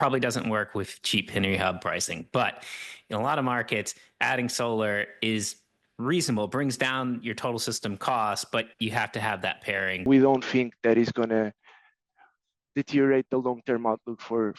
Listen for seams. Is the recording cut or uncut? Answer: cut